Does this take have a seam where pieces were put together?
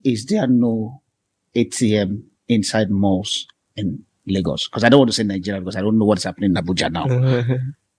no; 0 cuts

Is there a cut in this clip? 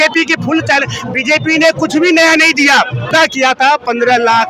yes; 1 cut; at 3.1 s

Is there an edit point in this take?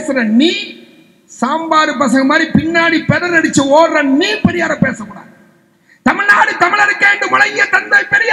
no; 0 cuts

